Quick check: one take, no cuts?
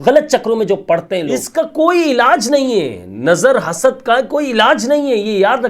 no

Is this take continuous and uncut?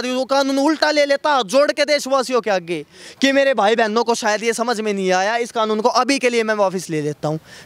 yes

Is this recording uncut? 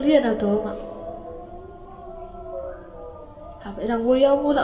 yes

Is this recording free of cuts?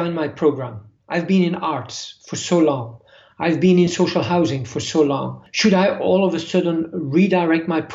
no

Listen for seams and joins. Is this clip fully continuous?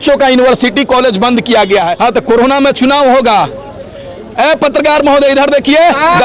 no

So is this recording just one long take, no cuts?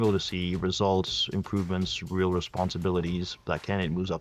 yes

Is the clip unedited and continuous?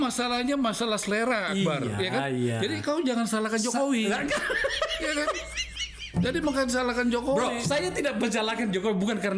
yes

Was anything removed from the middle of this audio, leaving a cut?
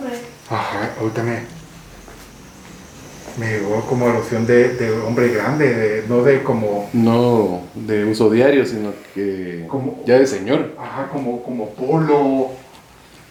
no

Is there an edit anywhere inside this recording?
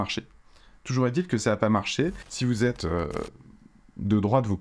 yes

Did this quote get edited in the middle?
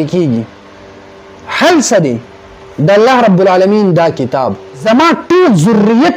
yes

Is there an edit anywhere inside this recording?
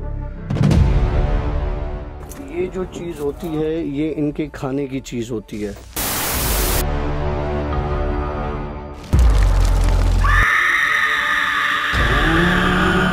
no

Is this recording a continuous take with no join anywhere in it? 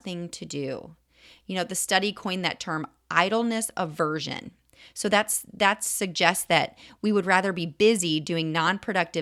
yes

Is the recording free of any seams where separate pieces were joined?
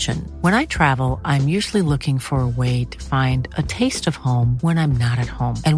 yes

